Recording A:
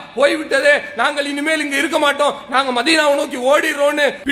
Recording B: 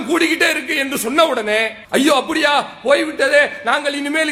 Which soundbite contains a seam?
B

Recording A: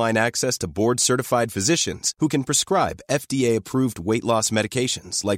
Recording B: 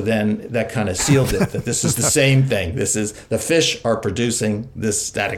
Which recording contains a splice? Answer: B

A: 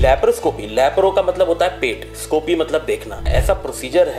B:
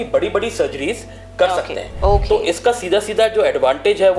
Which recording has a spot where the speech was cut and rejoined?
A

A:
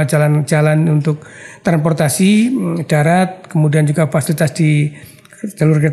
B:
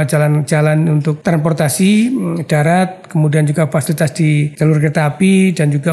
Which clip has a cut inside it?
B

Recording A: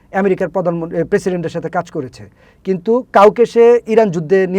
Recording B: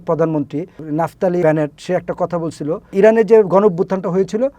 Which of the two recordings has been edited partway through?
B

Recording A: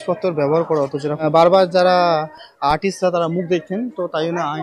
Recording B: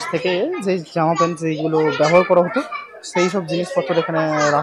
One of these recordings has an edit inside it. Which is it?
A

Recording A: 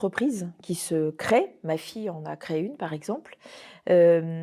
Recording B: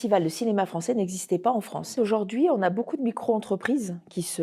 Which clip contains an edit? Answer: B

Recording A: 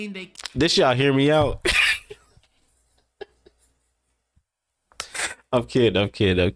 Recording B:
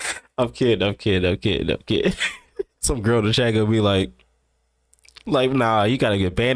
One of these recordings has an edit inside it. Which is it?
B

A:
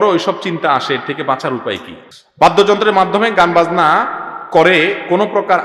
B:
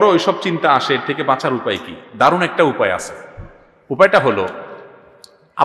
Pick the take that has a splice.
A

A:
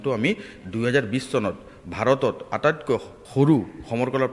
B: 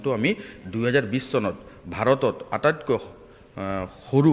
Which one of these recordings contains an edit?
A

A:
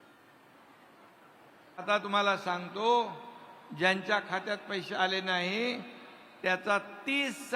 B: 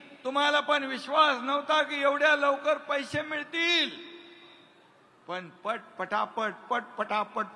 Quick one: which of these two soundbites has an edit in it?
A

